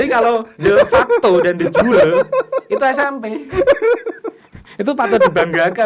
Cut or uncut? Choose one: uncut